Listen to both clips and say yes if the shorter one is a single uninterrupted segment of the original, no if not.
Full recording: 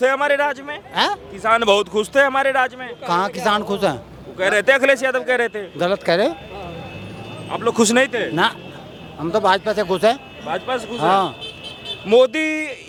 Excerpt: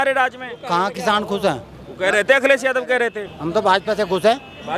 no